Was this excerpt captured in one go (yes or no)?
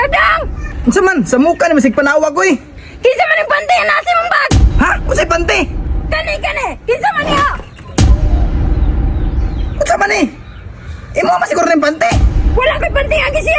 yes